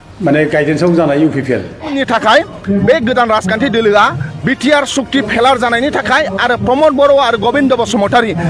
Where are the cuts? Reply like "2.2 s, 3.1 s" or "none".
1.9 s